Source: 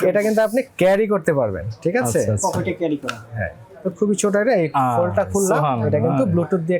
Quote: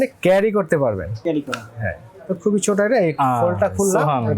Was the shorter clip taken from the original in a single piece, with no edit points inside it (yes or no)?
no